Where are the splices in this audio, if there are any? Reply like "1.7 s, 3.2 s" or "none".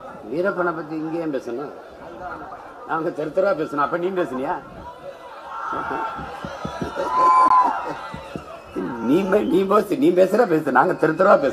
none